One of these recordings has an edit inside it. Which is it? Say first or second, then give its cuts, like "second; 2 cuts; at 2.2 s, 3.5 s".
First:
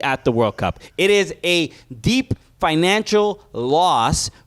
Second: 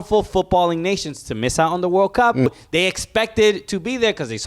second; 1 cut; at 2.5 s